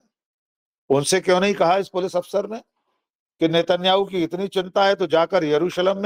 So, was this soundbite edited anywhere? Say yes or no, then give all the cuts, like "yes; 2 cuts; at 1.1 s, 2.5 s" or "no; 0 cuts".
no; 0 cuts